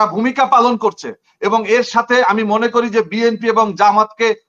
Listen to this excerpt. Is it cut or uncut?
uncut